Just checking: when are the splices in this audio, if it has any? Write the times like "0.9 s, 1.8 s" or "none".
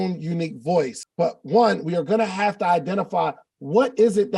1.0 s